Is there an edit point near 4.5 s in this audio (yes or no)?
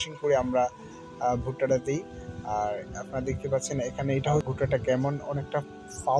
yes